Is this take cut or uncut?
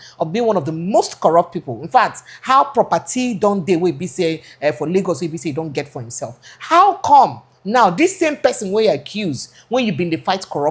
uncut